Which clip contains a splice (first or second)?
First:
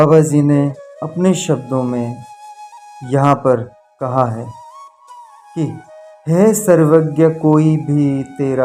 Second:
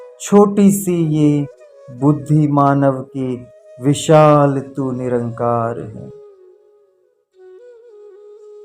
second